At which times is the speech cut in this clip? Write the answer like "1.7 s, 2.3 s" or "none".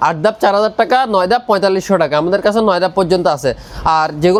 none

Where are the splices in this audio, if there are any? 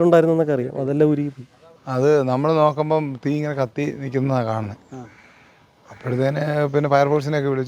none

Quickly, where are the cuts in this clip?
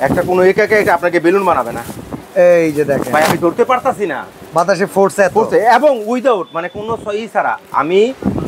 none

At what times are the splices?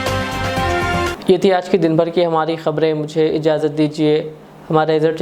none

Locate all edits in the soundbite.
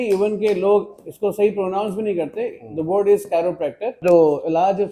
4.0 s

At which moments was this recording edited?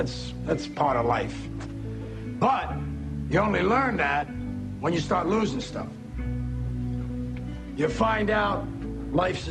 4.8 s

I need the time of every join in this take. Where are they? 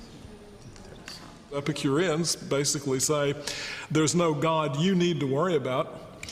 3.3 s

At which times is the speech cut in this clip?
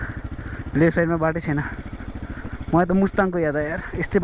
none

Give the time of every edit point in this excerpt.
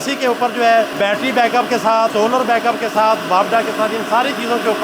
0.9 s, 2.1 s

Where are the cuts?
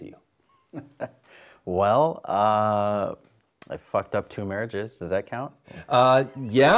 none

